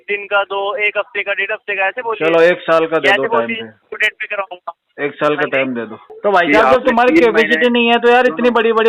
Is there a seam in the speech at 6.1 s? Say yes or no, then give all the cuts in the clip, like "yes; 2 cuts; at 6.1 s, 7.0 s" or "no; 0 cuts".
yes; 1 cut; at 6.1 s